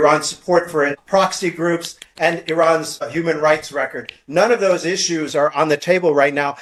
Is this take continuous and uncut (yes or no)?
yes